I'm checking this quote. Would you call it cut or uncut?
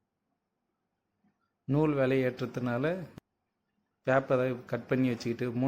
cut